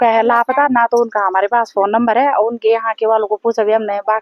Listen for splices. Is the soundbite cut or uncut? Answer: uncut